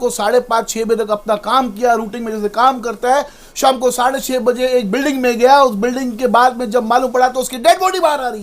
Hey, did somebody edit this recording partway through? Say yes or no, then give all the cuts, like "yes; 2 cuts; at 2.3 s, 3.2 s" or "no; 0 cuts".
no; 0 cuts